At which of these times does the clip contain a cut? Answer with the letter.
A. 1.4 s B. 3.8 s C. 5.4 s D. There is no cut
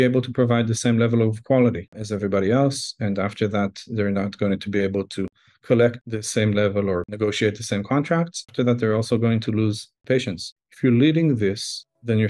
D